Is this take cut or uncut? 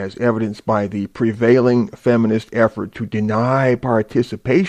cut